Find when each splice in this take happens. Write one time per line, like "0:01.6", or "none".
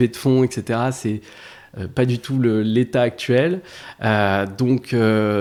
none